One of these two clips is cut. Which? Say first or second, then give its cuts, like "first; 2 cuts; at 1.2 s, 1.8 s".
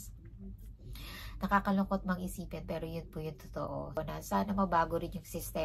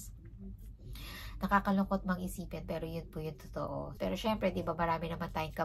first; 1 cut; at 4.0 s